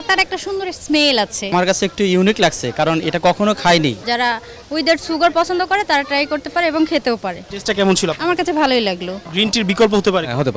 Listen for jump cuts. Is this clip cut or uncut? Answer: cut